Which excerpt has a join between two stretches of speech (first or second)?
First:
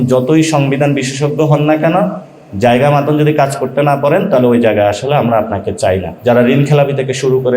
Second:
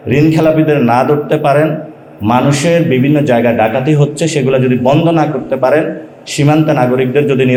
first